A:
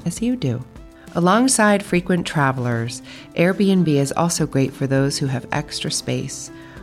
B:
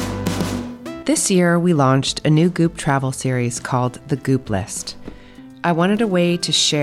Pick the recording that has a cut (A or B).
B